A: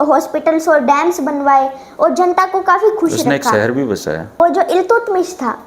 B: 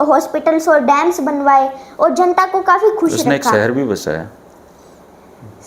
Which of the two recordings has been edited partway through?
A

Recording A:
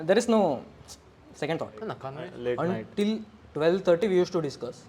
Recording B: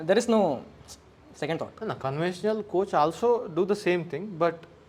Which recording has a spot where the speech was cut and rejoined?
A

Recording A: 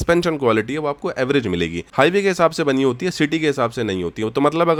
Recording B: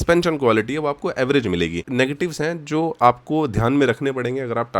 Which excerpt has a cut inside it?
B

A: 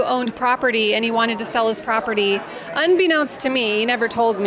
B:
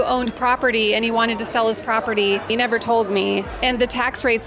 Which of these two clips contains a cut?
B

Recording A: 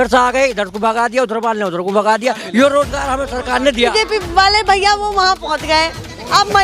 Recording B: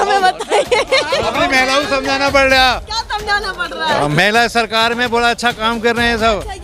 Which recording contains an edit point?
A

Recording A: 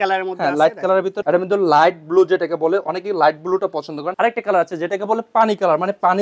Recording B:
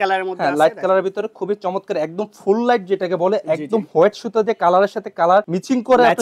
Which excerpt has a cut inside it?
A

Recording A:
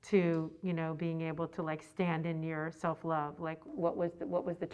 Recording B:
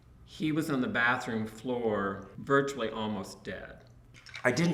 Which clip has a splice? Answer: A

